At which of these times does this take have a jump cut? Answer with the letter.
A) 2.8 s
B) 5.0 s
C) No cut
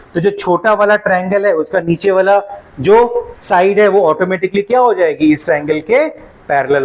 C